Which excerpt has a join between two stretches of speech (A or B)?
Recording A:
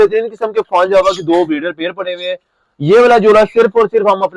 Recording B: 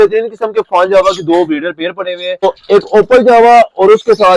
B